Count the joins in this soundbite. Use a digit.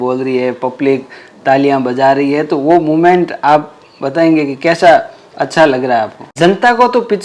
1